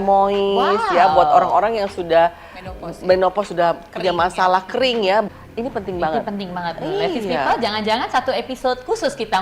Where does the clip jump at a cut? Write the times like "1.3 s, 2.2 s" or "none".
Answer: 5.3 s